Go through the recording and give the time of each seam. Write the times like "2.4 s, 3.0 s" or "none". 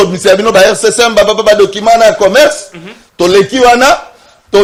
none